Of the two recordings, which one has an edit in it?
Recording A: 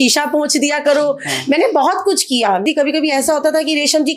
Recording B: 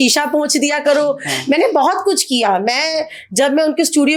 A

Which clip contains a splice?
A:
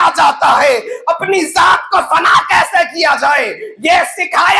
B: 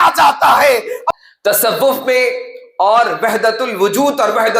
B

